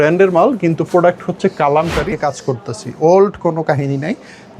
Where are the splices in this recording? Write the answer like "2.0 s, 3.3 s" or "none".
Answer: 2.1 s